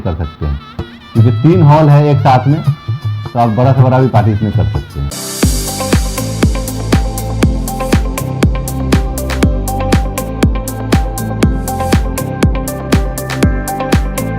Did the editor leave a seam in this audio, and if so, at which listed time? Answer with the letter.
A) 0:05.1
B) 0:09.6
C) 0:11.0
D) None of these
A